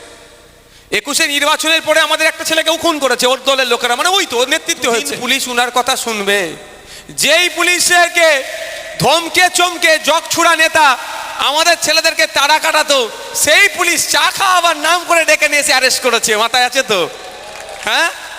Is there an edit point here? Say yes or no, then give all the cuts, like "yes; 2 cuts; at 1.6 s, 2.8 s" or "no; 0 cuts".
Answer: yes; 1 cut; at 5.2 s